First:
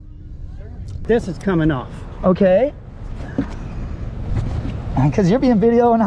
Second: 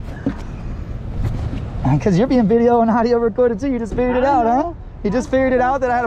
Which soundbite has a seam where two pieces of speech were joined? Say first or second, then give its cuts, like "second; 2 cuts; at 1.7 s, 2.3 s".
first; 1 cut; at 1.0 s